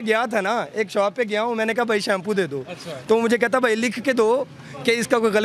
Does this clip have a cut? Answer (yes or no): no